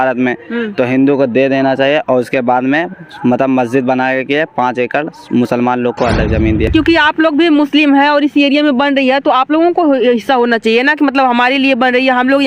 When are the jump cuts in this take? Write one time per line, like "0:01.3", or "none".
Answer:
0:06.7